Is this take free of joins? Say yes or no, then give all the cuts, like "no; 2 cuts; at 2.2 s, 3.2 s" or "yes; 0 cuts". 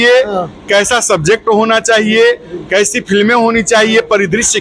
yes; 0 cuts